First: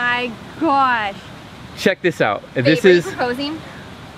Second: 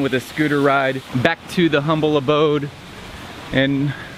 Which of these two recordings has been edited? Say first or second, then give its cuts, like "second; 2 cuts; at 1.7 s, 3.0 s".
second; 1 cut; at 1.1 s